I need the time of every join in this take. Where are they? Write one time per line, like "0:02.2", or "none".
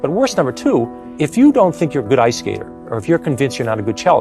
0:01.0